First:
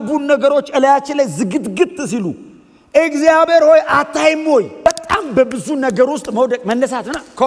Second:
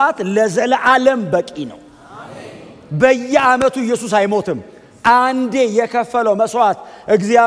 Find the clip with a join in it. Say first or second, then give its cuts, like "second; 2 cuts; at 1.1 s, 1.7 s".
first; 1 cut; at 4.9 s